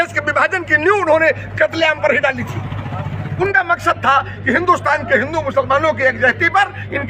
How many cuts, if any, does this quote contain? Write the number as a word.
one